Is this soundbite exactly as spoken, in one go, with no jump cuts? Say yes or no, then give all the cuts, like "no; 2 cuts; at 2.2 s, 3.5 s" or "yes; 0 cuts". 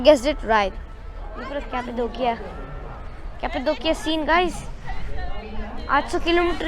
no; 1 cut; at 1.5 s